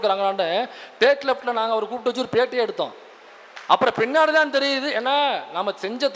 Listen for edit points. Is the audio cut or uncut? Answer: uncut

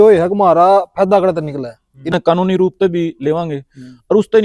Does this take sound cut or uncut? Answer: cut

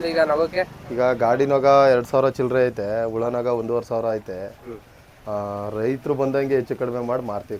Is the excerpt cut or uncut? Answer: uncut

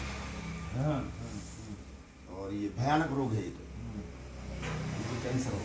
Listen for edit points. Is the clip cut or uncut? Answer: uncut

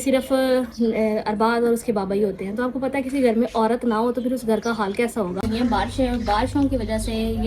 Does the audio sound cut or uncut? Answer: cut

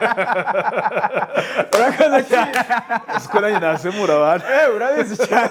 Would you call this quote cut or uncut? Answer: uncut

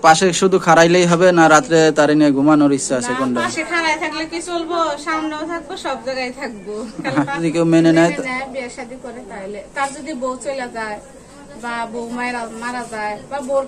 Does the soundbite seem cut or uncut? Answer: cut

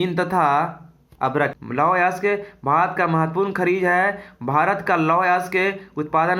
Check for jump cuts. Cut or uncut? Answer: cut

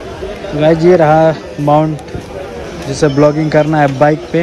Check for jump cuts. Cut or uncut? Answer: uncut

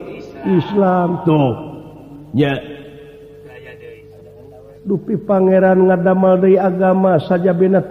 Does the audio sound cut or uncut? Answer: uncut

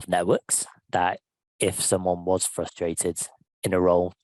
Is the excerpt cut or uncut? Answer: uncut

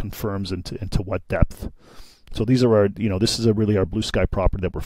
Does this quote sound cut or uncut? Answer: uncut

